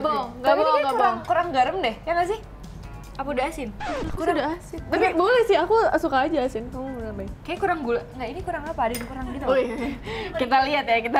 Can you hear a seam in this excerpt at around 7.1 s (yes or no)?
no